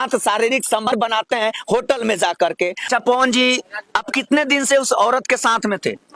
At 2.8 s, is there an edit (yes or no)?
yes